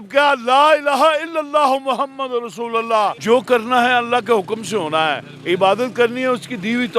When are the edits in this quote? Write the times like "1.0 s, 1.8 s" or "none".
3.2 s